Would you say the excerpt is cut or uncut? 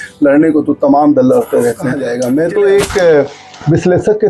cut